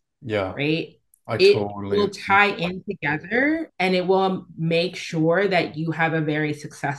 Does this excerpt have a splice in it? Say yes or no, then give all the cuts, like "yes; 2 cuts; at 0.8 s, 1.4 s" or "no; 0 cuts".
no; 0 cuts